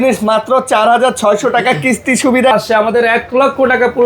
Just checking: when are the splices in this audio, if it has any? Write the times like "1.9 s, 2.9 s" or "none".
2.5 s